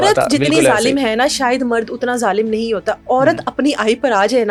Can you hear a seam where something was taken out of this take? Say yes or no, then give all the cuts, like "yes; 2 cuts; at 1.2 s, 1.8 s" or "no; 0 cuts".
no; 0 cuts